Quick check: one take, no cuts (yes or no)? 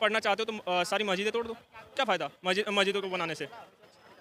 yes